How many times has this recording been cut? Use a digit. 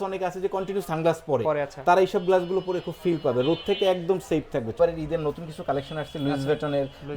1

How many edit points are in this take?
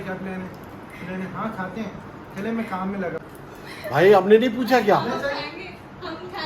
1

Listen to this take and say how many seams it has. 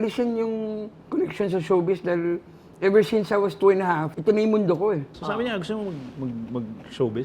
3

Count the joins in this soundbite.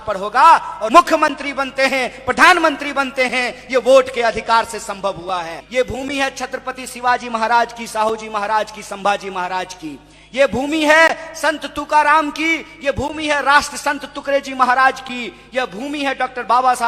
2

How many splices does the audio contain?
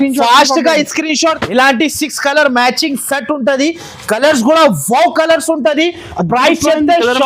1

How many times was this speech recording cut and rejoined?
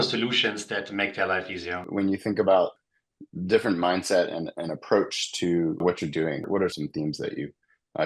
3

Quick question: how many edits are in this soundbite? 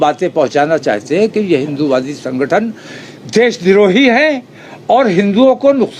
0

